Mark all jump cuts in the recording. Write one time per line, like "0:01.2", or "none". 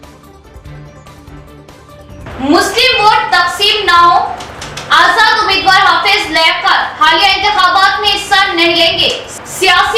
0:00.9